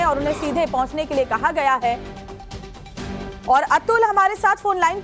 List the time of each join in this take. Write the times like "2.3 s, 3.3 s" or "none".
2.2 s